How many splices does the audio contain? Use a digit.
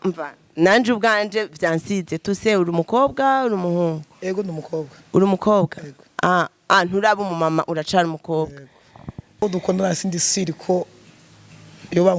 1